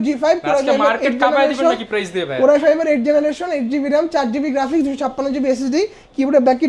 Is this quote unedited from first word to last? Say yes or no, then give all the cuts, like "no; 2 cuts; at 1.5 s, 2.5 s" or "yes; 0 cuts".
yes; 0 cuts